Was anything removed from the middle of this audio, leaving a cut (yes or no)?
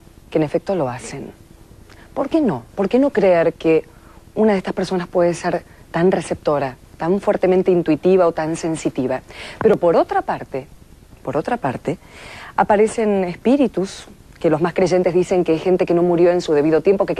yes